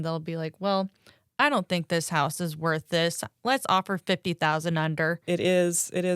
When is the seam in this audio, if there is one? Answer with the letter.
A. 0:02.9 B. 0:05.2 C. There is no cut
B